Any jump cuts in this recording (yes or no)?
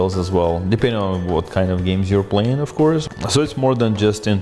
yes